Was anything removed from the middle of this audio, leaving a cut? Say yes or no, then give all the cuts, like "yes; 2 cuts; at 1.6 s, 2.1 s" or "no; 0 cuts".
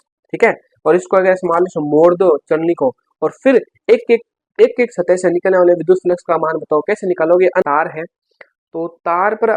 yes; 1 cut; at 7.6 s